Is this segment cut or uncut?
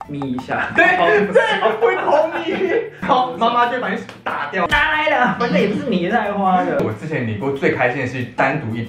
cut